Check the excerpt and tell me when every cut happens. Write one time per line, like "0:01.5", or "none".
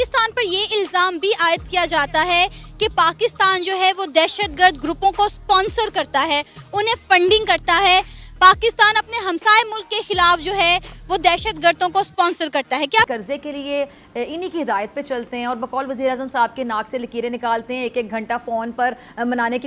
0:13.1

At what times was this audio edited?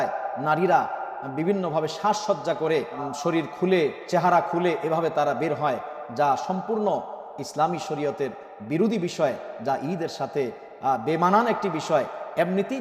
0:03.1

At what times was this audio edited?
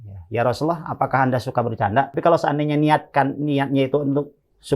0:02.1

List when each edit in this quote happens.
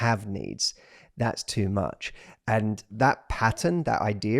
0:02.9

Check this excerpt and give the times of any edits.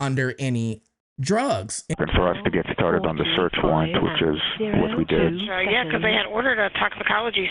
0:01.9

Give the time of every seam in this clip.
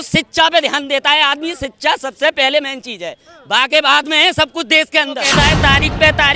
0:05.3

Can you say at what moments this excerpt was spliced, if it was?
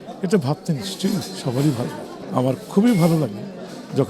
0:02.1

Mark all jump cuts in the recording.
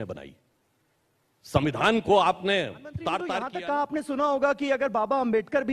0:03.4

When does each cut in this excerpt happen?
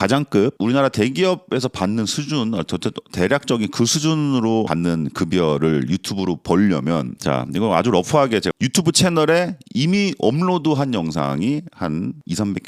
none

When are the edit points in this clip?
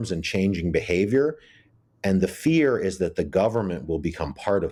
none

